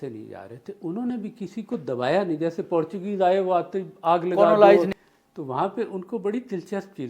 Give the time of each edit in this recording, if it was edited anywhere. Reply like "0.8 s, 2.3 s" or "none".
5.0 s